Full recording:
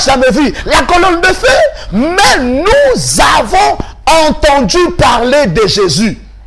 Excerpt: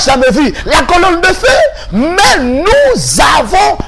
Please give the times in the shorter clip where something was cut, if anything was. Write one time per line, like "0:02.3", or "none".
none